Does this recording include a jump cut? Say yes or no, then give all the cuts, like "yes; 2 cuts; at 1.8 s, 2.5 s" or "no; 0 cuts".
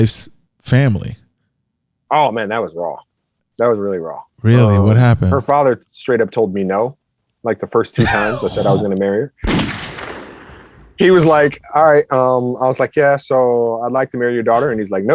no; 0 cuts